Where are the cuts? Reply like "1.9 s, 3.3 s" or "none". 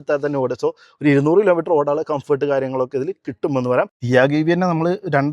4.0 s